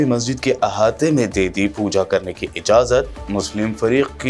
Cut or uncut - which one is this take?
uncut